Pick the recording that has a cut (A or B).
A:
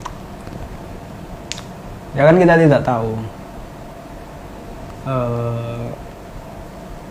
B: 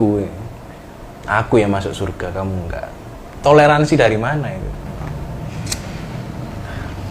B